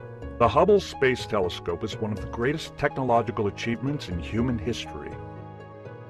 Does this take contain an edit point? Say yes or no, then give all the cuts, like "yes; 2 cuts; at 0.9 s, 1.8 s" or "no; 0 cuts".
yes; 1 cut; at 1.6 s